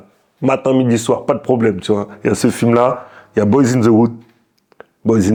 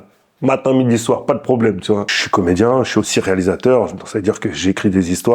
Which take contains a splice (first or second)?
second